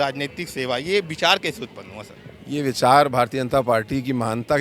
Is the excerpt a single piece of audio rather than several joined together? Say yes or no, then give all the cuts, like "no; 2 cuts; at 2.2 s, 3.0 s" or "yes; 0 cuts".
yes; 0 cuts